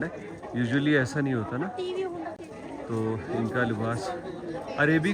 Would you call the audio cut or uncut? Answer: uncut